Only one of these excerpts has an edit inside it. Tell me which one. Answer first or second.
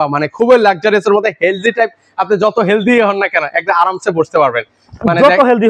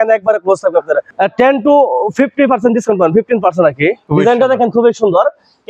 second